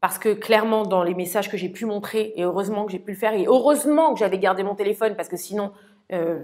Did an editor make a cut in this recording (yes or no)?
no